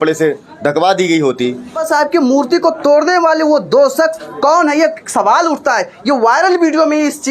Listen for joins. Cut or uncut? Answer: cut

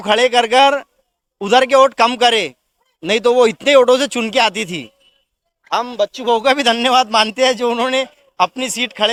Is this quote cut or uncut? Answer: uncut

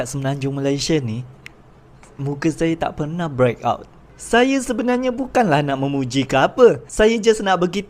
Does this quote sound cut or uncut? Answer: uncut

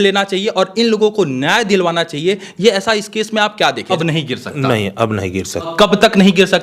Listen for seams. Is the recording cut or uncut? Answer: cut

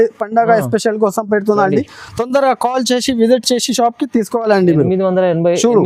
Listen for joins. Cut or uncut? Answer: uncut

